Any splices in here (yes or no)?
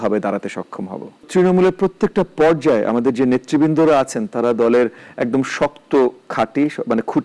yes